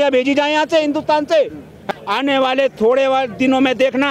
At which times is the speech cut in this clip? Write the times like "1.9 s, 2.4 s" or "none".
1.8 s